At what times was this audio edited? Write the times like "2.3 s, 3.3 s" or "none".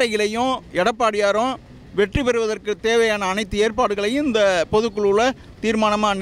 none